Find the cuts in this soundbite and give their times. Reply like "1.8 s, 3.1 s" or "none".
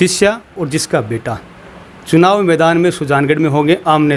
none